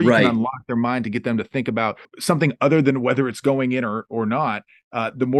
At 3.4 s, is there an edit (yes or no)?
no